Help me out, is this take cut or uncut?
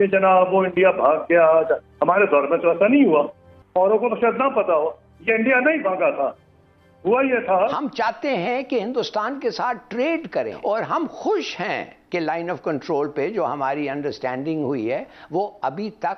cut